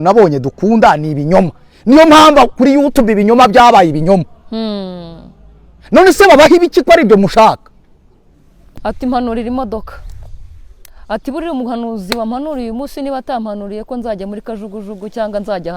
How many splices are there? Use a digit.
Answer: 1